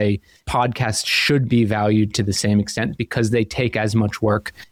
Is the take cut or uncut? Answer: uncut